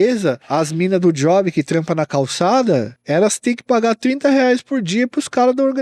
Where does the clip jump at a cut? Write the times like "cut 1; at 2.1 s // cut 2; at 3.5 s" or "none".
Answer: none

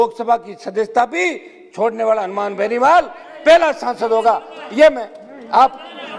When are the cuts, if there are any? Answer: none

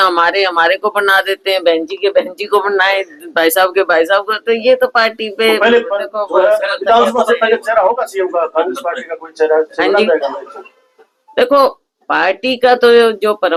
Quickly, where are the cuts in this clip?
none

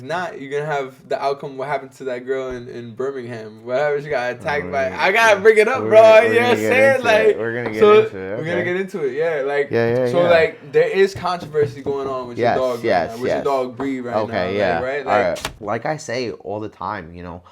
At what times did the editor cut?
cut 1; at 15.5 s

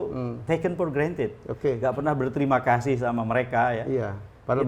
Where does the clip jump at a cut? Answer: none

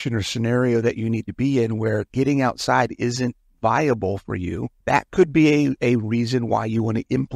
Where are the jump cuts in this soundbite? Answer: cut 1; at 4.7 s

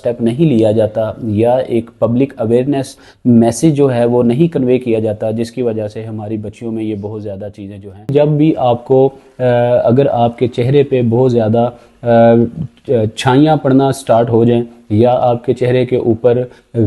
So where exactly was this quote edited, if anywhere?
cut 1; at 8.1 s

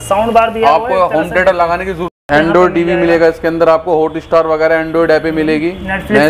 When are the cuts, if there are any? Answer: cut 1; at 2.3 s

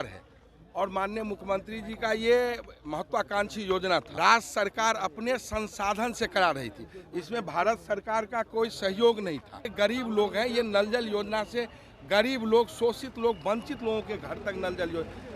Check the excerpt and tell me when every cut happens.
cut 1; at 4.1 s // cut 2; at 9.7 s

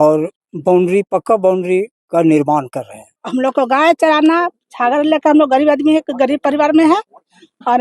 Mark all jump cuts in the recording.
cut 1; at 3.2 s

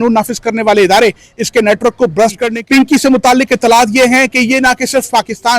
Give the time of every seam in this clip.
cut 1; at 2.5 s

